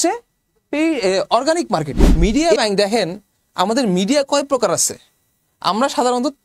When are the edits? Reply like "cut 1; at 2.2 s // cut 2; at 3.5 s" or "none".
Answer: cut 1; at 2.3 s